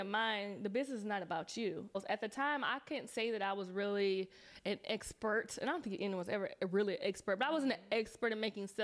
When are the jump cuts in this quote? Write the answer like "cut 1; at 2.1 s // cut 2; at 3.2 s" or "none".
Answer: cut 1; at 2.0 s